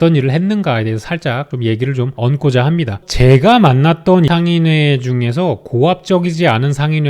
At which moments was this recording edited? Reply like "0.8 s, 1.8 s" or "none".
3.0 s, 4.3 s

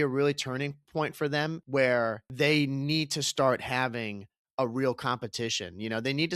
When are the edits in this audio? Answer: 1.6 s, 2.2 s

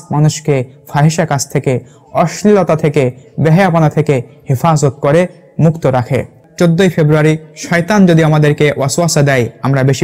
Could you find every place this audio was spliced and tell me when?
none

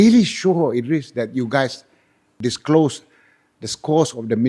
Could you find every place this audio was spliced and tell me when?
2.3 s

